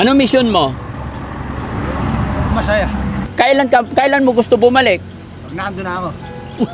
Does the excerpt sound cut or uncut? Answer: cut